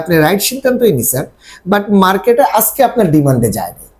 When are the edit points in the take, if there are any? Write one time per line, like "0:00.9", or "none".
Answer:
none